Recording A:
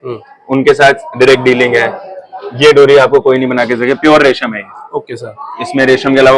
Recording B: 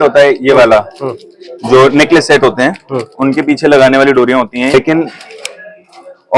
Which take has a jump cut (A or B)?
B